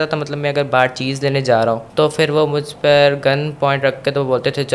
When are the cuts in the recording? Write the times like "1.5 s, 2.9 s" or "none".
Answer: none